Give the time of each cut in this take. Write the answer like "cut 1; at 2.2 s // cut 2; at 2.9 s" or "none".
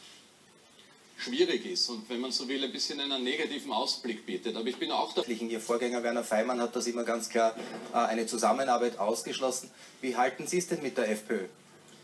none